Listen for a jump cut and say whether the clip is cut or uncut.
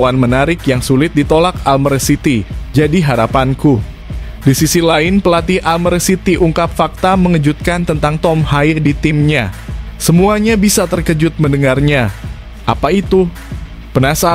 uncut